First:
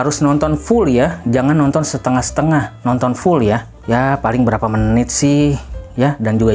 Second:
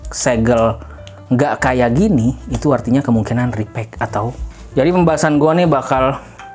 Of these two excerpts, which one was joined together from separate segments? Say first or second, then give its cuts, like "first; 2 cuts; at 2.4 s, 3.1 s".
second; 1 cut; at 4.5 s